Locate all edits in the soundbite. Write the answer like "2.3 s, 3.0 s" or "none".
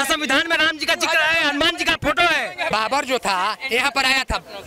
2.7 s

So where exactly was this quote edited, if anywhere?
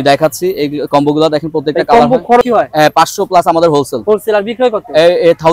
2.4 s

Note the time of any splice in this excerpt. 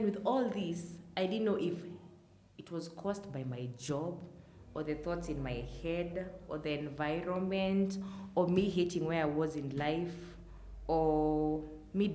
none

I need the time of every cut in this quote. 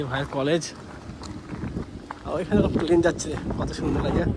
none

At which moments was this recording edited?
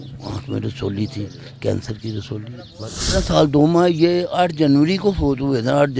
3.2 s

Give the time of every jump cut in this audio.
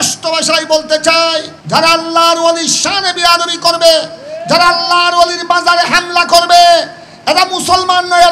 1.5 s

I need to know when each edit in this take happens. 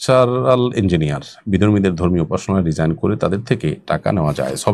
none

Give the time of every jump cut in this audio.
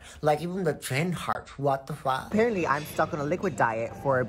2.3 s

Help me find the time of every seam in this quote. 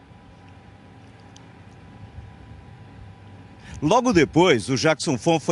4.1 s

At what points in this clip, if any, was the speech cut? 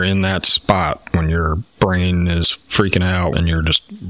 1.6 s, 3.3 s

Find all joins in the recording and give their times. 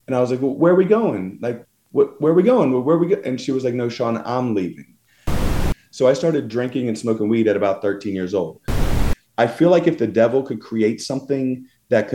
5.5 s, 8.8 s

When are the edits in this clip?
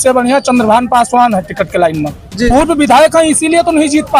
2.5 s

